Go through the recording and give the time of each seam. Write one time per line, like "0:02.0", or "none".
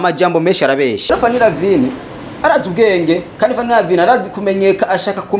0:01.1